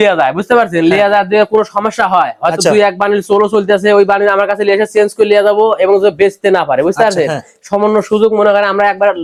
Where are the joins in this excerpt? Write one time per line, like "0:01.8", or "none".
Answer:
none